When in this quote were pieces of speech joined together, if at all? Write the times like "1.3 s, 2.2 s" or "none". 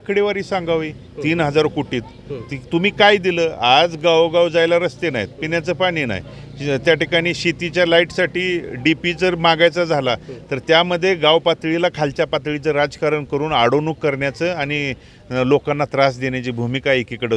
none